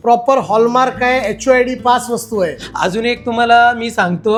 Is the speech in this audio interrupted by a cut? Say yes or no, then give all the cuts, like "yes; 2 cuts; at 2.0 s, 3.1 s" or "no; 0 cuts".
no; 0 cuts